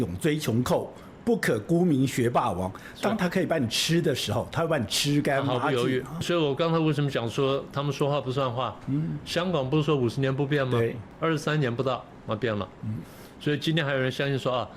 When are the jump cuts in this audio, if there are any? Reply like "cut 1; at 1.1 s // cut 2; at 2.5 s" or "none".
cut 1; at 6.2 s // cut 2; at 11.1 s

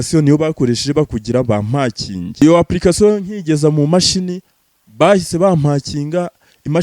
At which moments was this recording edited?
cut 1; at 2.4 s

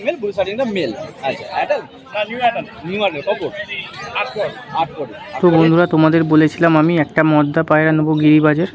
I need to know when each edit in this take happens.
cut 1; at 5.3 s

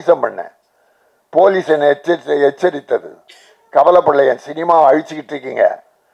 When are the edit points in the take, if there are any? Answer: none

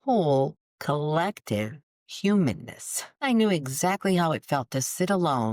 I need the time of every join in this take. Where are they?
cut 1; at 3.2 s

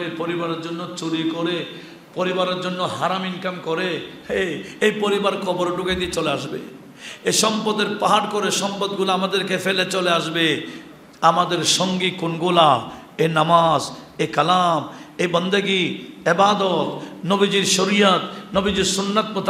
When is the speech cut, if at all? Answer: none

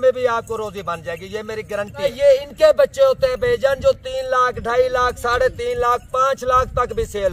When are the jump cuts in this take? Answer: cut 1; at 2.0 s

